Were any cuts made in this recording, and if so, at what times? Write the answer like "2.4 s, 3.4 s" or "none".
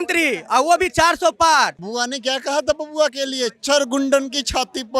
1.8 s